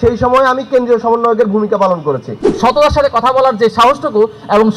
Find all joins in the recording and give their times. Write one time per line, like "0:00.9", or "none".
0:02.5